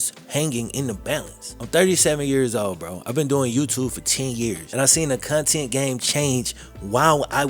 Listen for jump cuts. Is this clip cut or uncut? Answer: uncut